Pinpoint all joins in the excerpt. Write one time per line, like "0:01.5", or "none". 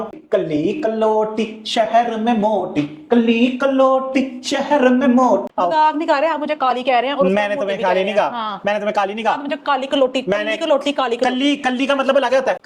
0:05.5